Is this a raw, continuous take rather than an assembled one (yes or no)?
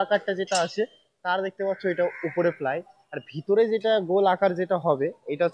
yes